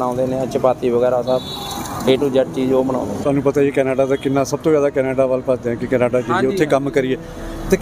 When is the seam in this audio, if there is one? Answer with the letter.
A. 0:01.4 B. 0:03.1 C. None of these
B